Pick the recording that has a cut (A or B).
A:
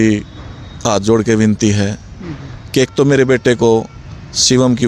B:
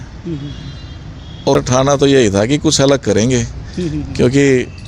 B